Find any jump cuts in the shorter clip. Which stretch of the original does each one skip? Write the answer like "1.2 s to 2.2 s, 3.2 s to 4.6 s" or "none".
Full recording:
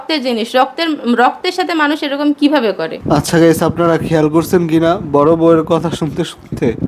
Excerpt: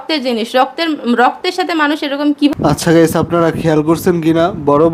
2.5 s to 3.0 s